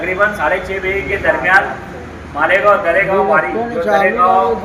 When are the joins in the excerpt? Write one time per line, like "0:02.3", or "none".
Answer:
none